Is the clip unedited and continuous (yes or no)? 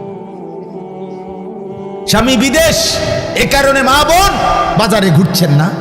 no